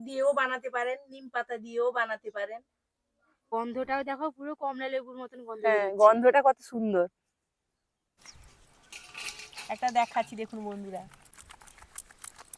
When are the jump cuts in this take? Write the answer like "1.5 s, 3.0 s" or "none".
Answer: 3.5 s, 8.2 s, 11.4 s